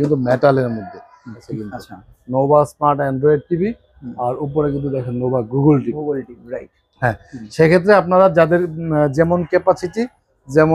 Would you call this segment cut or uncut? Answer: cut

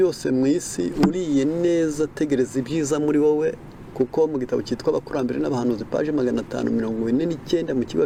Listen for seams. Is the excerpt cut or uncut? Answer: uncut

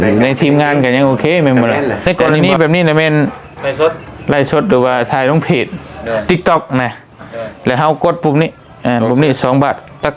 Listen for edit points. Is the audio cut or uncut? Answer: cut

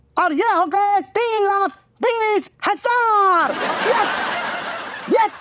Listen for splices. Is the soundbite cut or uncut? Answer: uncut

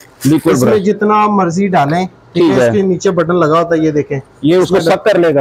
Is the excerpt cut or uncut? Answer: uncut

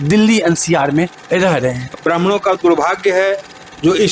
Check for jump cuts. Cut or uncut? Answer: cut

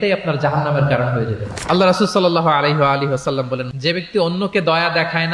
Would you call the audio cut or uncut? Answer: cut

